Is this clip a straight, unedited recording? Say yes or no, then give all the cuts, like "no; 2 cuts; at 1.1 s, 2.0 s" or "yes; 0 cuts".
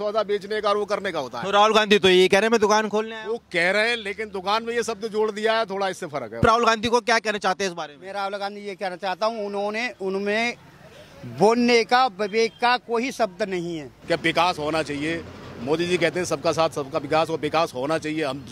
no; 2 cuts; at 6.4 s, 13.9 s